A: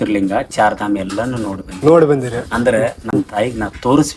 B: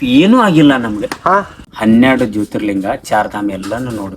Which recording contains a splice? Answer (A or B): B